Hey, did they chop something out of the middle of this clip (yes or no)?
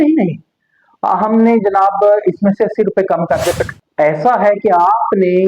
yes